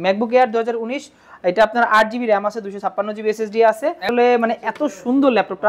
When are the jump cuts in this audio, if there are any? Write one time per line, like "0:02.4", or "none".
0:04.0